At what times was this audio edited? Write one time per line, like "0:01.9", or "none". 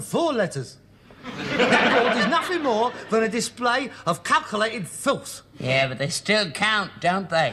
0:01.7